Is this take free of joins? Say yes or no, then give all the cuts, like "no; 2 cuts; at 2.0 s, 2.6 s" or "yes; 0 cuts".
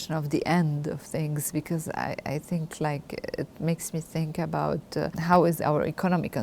no; 1 cut; at 5.1 s